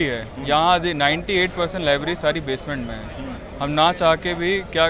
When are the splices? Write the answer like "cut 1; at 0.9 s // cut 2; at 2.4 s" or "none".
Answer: none